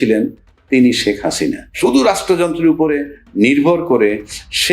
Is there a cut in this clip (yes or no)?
yes